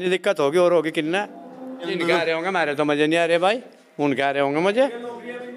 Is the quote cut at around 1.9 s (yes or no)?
yes